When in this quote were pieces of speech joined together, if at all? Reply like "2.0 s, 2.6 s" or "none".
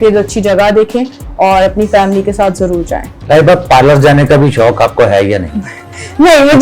3.1 s